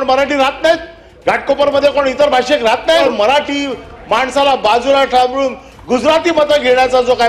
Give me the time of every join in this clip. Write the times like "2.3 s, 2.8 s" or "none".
3.0 s